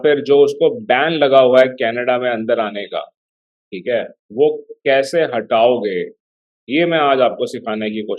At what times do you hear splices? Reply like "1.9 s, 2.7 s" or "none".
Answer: none